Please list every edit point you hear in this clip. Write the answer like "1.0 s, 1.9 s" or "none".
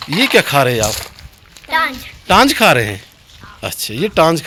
none